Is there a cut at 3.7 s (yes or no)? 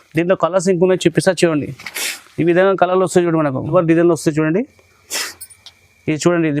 yes